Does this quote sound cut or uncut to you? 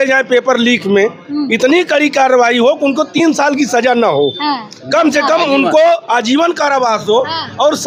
uncut